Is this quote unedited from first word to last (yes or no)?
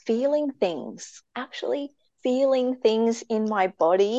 no